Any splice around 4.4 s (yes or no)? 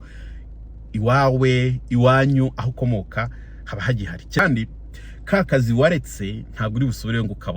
yes